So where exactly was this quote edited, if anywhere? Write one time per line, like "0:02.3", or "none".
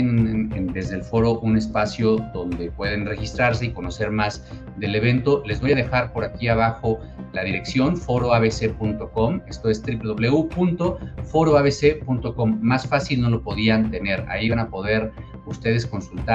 none